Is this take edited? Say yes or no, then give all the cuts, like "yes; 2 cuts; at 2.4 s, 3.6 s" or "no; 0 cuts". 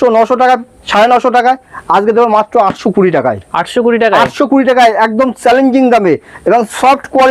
no; 0 cuts